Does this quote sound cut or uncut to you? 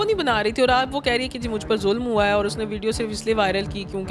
uncut